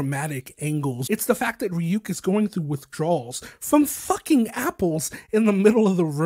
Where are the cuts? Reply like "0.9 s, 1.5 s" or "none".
1.0 s